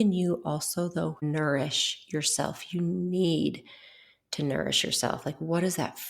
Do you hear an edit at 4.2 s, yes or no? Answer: no